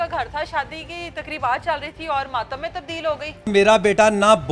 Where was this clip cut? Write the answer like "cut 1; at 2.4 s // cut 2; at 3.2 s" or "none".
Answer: cut 1; at 3.5 s